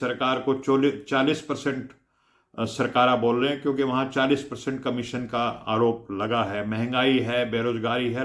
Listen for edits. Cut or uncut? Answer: uncut